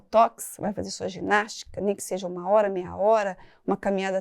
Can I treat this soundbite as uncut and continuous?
yes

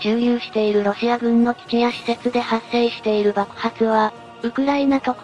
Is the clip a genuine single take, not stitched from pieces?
no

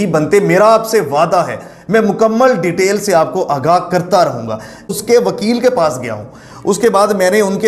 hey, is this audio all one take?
no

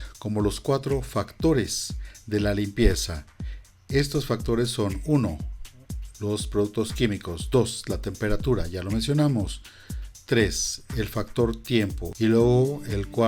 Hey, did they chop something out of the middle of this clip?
yes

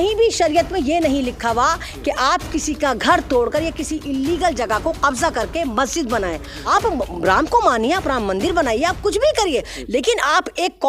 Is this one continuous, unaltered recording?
no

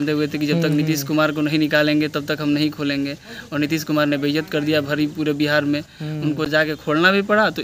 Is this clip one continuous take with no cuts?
yes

